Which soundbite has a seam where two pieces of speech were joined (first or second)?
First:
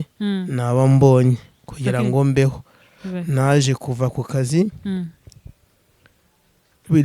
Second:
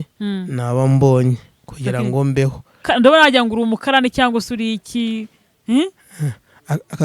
second